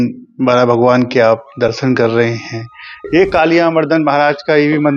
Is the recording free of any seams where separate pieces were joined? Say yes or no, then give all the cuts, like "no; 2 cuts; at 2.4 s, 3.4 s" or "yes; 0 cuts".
no; 1 cut; at 2.9 s